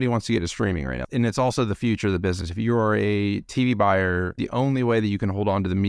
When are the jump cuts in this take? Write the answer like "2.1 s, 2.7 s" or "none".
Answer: 1.1 s, 4.4 s